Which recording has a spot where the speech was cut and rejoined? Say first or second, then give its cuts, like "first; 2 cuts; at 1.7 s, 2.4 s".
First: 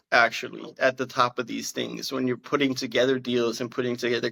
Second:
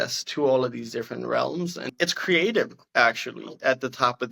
second; 1 cut; at 1.9 s